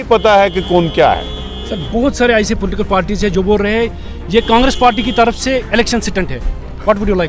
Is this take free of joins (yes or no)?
yes